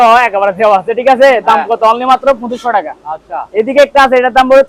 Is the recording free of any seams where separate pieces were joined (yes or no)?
yes